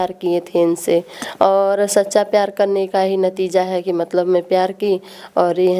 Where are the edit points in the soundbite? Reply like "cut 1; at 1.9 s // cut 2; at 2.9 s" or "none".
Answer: none